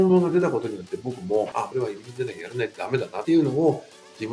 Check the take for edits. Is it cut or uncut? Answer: cut